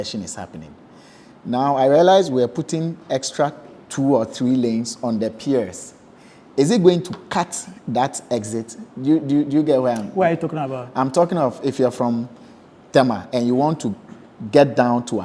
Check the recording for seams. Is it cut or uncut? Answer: uncut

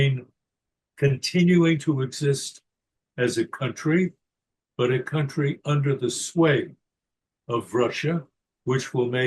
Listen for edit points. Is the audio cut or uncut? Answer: uncut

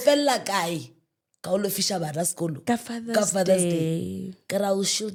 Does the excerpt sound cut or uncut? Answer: uncut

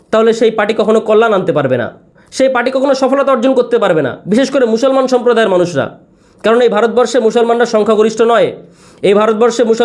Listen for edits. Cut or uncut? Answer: uncut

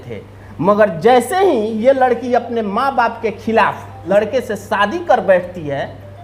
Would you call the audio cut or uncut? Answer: uncut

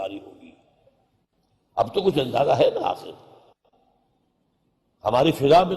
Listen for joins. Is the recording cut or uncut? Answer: cut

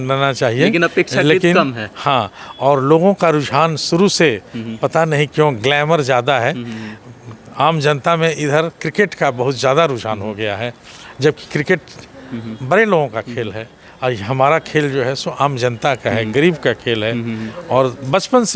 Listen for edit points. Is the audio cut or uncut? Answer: uncut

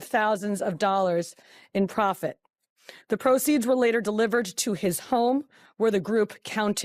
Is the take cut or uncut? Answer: uncut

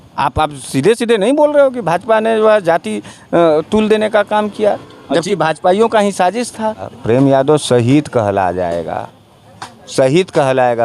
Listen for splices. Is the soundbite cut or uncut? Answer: cut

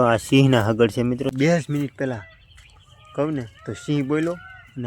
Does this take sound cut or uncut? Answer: cut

